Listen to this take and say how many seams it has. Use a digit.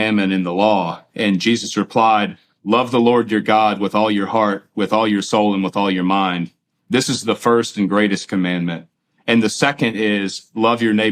0